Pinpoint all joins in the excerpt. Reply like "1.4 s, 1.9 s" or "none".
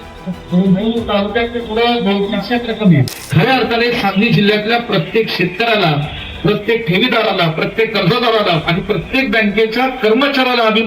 3.0 s